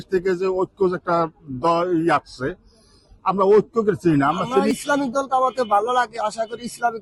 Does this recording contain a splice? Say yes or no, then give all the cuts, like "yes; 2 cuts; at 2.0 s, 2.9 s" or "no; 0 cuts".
yes; 1 cut; at 4.7 s